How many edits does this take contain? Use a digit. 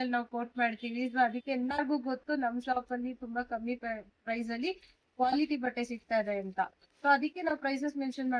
0